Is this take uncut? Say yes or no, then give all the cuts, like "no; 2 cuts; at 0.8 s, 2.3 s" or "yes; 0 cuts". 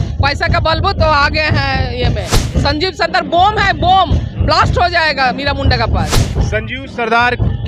no; 1 cut; at 6.3 s